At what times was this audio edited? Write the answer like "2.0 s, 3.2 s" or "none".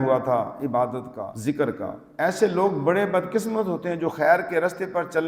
1.2 s, 2.0 s